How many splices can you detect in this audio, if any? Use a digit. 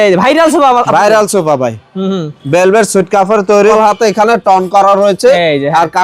1